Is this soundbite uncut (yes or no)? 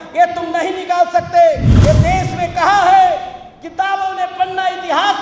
no